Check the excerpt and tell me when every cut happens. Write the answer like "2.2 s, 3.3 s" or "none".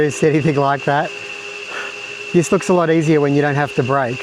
none